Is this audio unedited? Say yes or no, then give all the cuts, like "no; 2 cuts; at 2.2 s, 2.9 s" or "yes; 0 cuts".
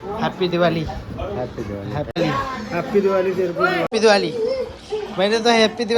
no; 2 cuts; at 2.2 s, 3.9 s